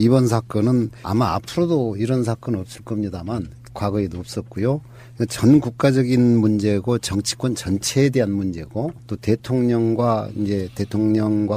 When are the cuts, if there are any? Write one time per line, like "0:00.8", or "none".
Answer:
0:05.7